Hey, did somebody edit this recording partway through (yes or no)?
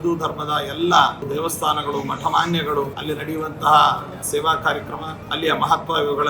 yes